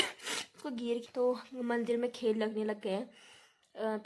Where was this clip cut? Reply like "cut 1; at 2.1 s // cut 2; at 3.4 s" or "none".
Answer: cut 1; at 1.0 s